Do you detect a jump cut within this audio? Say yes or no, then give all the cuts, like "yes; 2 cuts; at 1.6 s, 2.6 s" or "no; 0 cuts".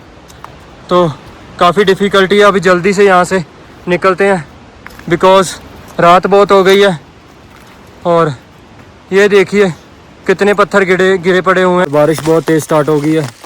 yes; 1 cut; at 11.8 s